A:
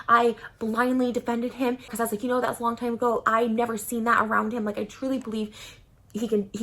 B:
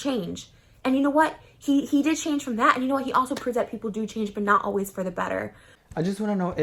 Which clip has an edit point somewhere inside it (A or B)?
A